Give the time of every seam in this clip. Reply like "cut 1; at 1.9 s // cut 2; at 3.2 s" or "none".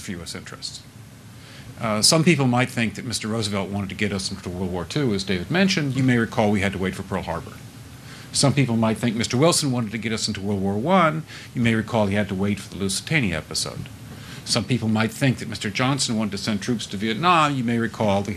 cut 1; at 1.2 s // cut 2; at 5.2 s // cut 3; at 14.2 s